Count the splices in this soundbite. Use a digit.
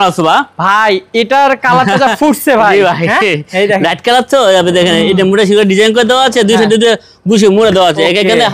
0